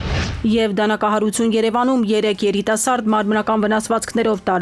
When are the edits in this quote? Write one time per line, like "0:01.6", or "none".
none